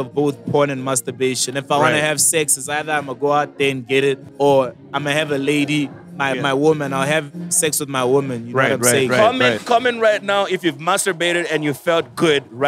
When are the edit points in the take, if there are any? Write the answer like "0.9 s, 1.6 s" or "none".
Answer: 4.3 s, 6.0 s, 9.2 s